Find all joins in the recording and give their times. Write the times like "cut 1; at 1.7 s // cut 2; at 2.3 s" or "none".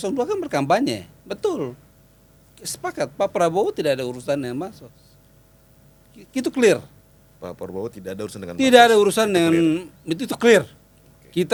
none